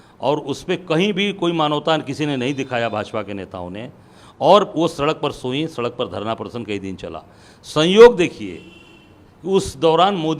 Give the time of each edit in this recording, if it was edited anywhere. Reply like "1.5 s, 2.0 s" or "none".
none